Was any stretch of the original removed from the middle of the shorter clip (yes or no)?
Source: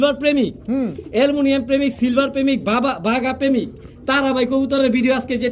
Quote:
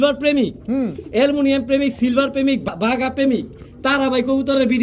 yes